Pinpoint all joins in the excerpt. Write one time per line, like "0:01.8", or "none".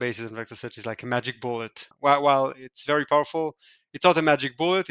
0:01.8

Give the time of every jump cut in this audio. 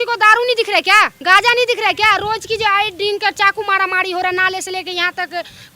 0:01.2

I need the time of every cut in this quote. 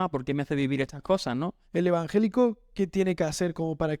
0:01.6

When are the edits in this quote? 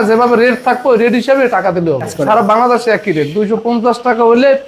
0:02.1

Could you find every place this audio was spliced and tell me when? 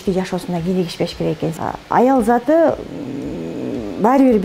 0:01.5

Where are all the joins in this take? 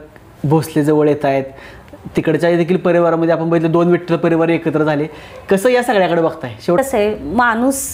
0:06.8

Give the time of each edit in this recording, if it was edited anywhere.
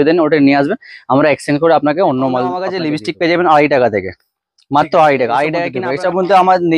0:02.7
0:05.8

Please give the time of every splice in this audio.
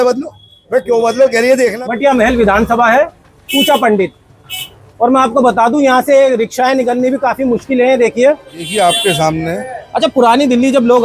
0:01.8
0:08.7

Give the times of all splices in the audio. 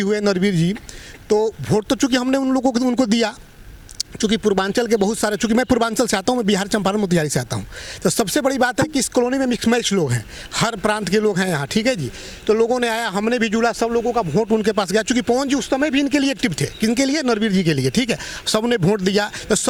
none

